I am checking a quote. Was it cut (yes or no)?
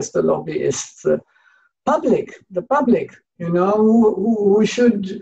no